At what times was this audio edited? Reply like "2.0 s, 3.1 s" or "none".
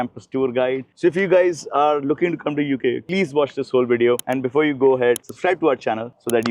0.9 s